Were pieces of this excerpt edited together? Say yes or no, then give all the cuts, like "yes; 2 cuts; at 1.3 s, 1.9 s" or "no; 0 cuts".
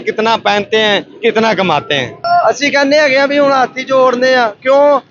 yes; 1 cut; at 2.2 s